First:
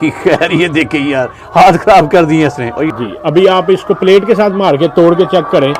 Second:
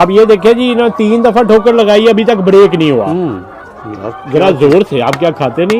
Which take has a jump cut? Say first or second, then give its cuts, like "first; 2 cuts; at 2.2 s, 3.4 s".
first; 1 cut; at 2.9 s